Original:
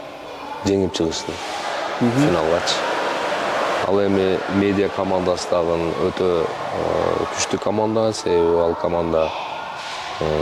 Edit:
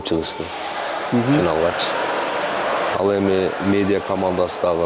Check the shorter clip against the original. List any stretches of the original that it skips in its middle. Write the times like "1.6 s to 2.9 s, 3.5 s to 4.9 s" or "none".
none